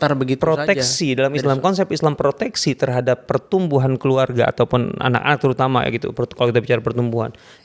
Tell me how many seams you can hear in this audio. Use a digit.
0